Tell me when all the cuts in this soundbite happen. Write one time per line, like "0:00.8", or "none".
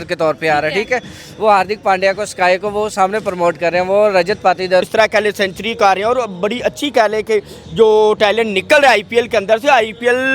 0:04.9